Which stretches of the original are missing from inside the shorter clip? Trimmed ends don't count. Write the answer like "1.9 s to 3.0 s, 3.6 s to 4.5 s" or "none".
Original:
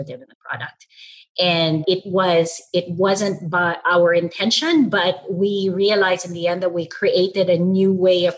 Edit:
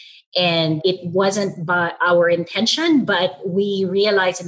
2.1 s to 2.9 s